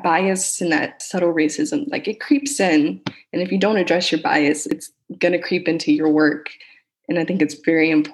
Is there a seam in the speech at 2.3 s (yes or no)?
no